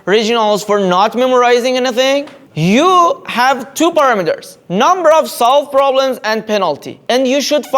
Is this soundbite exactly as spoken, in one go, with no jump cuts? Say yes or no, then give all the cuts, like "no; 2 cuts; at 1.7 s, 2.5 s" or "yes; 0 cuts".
yes; 0 cuts